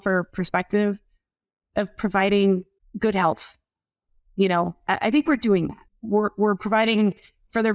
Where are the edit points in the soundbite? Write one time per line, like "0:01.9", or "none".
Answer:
0:02.8
0:05.8

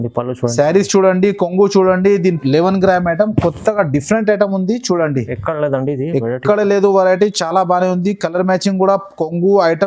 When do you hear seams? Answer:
0:02.4

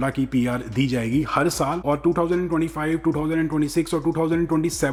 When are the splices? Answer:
none

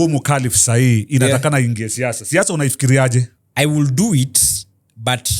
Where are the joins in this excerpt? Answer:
0:03.4

